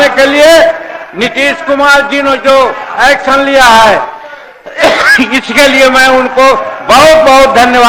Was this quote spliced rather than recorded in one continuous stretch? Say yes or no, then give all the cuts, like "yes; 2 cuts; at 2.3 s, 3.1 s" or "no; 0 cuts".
no; 0 cuts